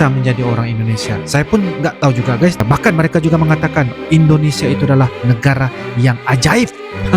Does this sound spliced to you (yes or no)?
yes